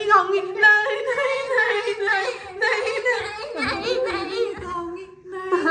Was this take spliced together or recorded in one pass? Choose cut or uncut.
uncut